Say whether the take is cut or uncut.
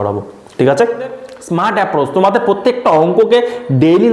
cut